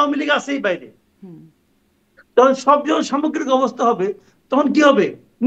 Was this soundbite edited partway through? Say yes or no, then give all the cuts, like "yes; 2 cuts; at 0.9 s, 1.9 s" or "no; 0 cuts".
no; 0 cuts